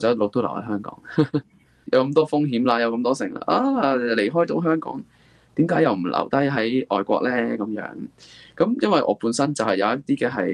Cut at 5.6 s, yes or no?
no